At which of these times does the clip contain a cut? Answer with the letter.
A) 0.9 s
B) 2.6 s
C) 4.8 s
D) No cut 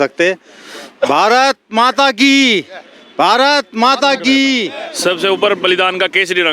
C